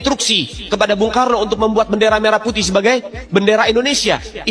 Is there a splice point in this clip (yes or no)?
no